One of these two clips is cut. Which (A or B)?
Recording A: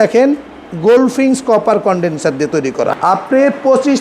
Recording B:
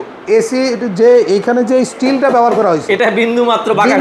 A